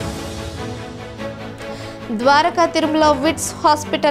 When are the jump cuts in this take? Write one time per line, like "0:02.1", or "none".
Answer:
0:02.0

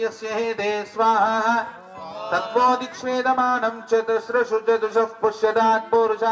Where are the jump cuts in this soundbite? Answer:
none

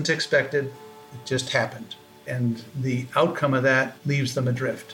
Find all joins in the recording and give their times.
0:02.7
0:04.0

